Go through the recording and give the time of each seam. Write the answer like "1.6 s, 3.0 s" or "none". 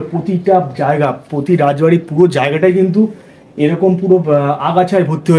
none